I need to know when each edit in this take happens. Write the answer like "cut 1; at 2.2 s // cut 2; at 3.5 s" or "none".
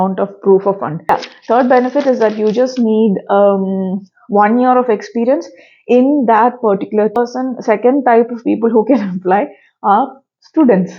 cut 1; at 1.1 s // cut 2; at 7.2 s